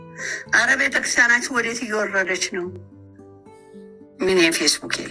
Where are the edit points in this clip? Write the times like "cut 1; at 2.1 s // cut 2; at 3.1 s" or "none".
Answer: cut 1; at 2.7 s // cut 2; at 4.1 s